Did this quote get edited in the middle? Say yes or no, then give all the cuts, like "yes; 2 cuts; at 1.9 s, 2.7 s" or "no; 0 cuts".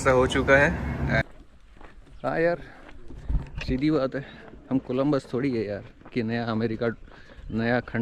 yes; 1 cut; at 1.2 s